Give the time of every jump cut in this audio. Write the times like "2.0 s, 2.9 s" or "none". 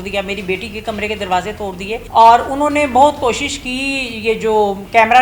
2.0 s

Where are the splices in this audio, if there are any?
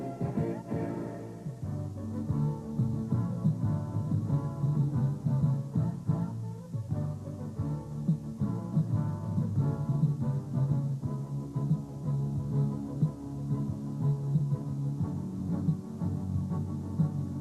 12.3 s

